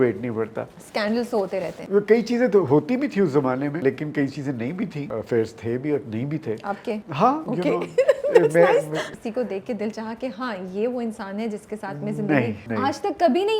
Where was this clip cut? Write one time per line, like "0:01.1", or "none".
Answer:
0:01.2
0:03.8
0:05.0
0:07.3
0:09.0
0:12.6